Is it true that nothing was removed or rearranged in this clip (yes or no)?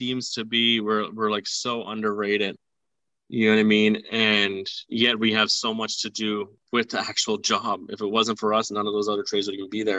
yes